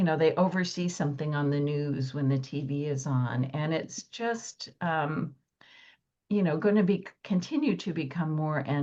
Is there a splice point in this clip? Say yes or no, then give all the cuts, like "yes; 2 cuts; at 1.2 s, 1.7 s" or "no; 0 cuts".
no; 0 cuts